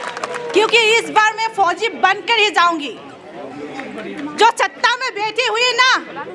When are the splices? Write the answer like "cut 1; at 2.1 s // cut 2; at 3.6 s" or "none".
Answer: none